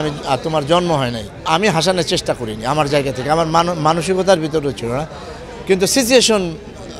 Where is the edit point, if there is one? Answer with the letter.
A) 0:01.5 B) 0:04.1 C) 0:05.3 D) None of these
A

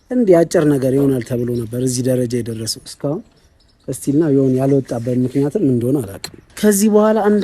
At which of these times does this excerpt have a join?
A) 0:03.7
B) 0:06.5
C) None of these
B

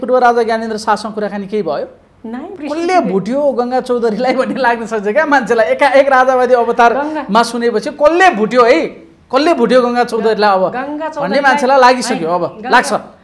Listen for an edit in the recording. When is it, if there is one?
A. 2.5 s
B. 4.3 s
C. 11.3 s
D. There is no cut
A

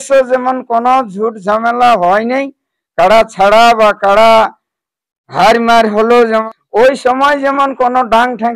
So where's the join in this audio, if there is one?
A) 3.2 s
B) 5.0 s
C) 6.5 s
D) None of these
C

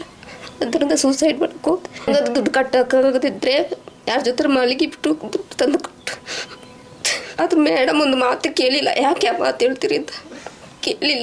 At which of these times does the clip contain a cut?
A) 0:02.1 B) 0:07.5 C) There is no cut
A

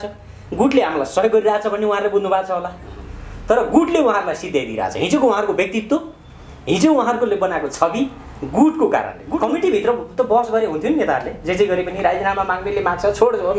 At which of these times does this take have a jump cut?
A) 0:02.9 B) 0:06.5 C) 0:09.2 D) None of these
C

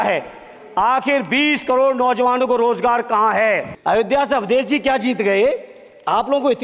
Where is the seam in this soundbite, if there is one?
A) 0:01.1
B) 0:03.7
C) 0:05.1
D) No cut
B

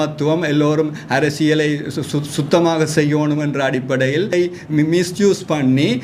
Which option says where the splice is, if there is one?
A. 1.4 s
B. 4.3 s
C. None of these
B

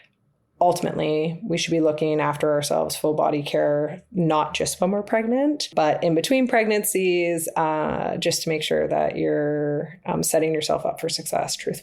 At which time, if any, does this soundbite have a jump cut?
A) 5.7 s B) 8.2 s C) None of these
A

